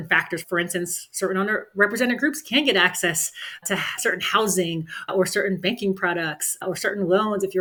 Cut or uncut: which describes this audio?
uncut